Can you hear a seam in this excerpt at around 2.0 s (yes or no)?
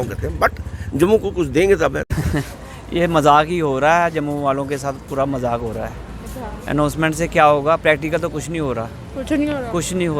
yes